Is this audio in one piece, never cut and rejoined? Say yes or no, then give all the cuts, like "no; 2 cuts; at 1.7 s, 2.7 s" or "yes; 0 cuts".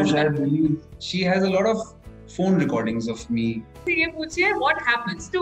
no; 2 cuts; at 1.0 s, 3.8 s